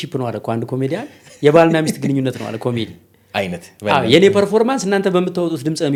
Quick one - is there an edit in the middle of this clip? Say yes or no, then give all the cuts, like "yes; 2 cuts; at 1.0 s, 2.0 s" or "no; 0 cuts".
no; 0 cuts